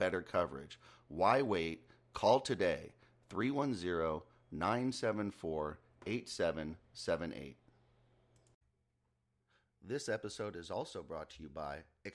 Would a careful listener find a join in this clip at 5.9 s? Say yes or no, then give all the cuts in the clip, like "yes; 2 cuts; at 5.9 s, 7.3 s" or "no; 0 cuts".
no; 1 cut; at 8.8 s